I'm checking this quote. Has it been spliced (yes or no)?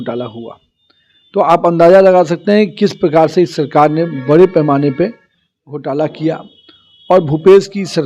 no